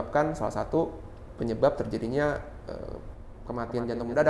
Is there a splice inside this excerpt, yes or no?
no